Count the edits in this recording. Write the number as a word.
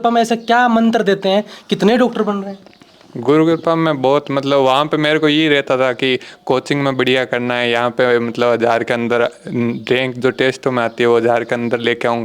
zero